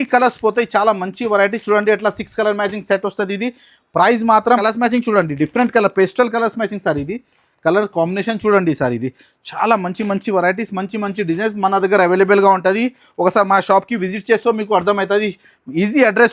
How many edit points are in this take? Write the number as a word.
one